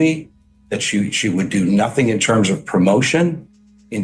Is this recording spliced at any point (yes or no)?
yes